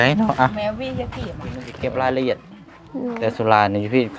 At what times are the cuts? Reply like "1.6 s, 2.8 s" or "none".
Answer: 1.7 s